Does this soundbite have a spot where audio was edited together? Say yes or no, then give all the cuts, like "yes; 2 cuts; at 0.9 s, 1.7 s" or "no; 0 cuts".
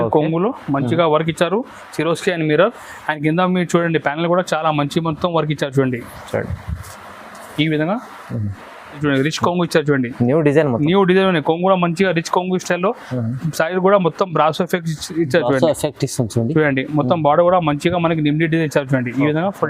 yes; 1 cut; at 9.0 s